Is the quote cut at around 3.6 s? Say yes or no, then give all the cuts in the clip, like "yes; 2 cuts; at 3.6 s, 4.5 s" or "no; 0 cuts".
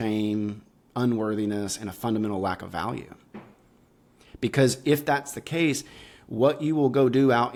no; 0 cuts